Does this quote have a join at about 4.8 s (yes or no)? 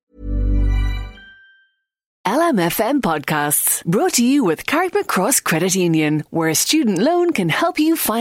no